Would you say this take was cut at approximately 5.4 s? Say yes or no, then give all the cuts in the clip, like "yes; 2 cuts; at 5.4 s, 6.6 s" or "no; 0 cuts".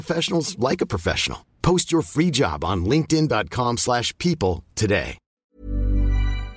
yes; 1 cut; at 5.4 s